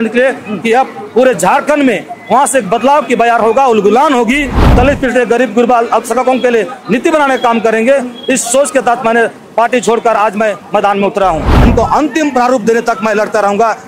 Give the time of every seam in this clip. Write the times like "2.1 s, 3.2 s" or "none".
4.6 s, 11.5 s